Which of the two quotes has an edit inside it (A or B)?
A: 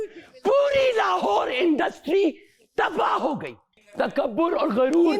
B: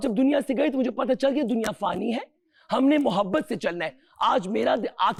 A